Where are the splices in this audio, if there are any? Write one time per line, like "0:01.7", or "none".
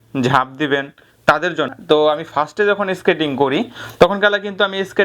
0:01.7